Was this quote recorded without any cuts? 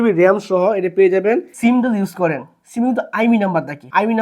no; 1 cut; at 1.5 s

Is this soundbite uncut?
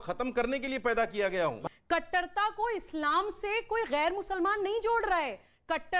no; 1 cut; at 1.6 s

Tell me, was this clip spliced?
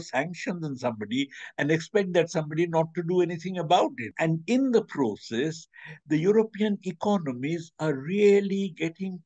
yes; 1 cut; at 4.1 s

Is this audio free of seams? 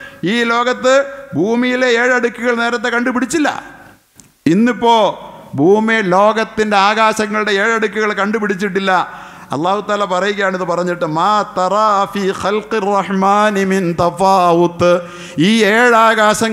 yes; 0 cuts

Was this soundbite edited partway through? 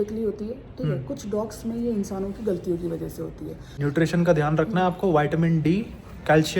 yes; 1 cut; at 3.7 s

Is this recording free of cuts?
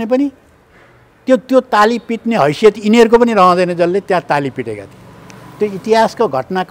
yes; 0 cuts

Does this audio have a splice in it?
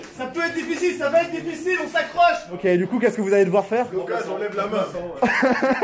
yes; 1 cut; at 2.5 s

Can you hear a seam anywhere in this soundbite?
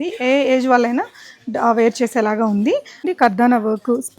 yes; 1 cut; at 3.1 s

